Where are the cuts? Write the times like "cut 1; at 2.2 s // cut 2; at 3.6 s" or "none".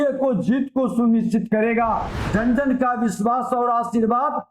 cut 1; at 2.1 s